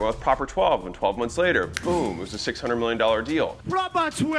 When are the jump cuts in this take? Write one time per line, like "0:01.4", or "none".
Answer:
none